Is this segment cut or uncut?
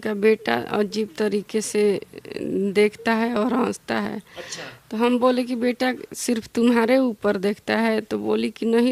uncut